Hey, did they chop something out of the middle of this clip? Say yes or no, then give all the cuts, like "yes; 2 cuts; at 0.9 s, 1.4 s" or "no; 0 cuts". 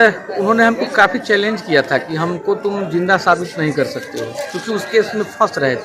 no; 0 cuts